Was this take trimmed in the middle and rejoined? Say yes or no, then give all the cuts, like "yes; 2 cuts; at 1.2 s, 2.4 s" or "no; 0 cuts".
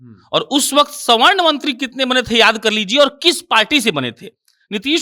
no; 0 cuts